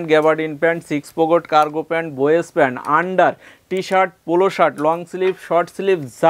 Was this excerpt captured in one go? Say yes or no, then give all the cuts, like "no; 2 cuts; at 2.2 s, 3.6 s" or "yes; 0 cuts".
yes; 0 cuts